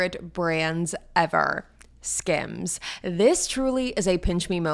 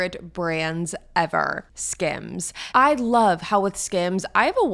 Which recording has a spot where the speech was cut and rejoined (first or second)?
second